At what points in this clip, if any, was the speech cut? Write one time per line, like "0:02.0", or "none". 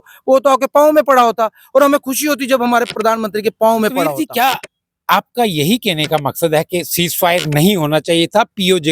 0:04.1